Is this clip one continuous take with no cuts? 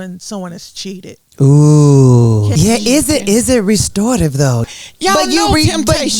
no; 2 cuts; at 2.5 s, 4.7 s

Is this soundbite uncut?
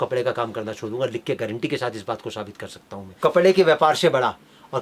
no; 1 cut; at 3.1 s

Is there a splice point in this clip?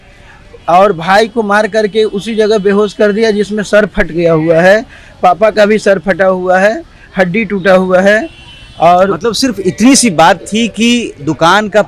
no; 0 cuts

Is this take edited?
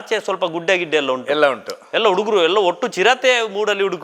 no; 0 cuts

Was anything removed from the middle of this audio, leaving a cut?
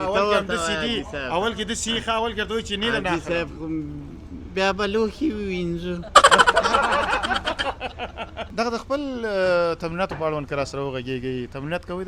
yes; 1 cut; at 8.4 s

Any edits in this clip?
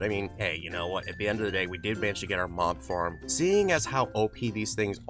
yes; 1 cut; at 3.2 s

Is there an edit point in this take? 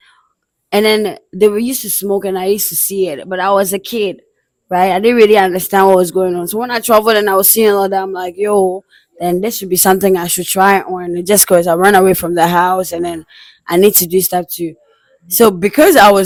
no; 0 cuts

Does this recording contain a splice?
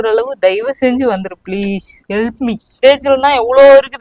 yes; 1 cut; at 2.7 s

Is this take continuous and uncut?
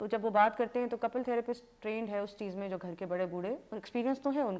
yes; 0 cuts

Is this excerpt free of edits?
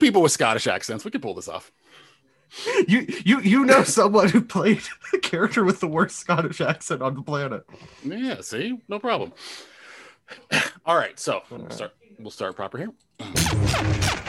no; 1 cut; at 13.3 s

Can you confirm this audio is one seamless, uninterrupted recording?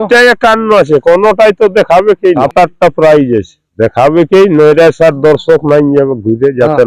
no; 1 cut; at 2.4 s

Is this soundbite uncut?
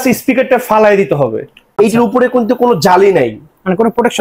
no; 1 cut; at 1.6 s

